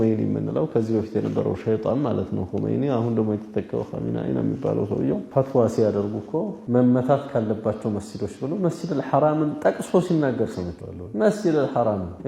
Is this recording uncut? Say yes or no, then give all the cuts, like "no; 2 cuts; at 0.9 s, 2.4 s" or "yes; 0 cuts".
no; 1 cut; at 5.3 s